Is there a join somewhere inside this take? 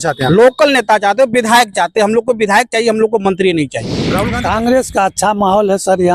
yes; 1 cut; at 4.2 s

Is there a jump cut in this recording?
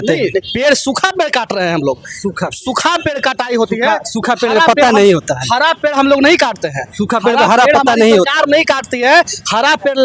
no; 0 cuts

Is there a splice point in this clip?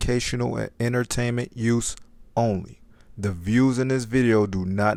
no; 0 cuts

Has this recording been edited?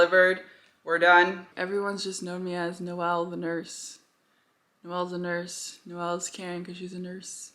yes; 1 cut; at 1.5 s

